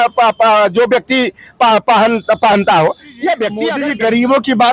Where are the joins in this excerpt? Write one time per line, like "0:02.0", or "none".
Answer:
0:03.6